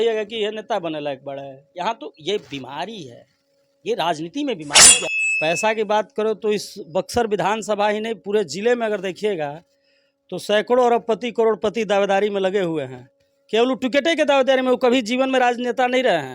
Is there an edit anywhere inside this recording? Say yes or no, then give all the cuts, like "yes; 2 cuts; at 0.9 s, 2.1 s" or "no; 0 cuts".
yes; 1 cut; at 5.0 s